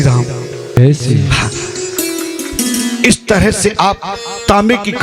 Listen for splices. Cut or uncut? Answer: uncut